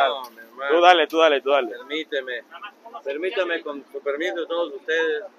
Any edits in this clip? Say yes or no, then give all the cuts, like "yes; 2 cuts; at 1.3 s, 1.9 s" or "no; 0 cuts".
no; 0 cuts